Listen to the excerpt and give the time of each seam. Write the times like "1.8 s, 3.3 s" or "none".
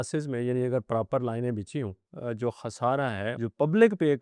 2.1 s